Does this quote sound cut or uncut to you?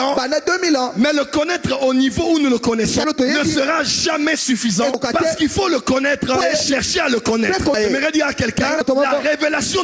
cut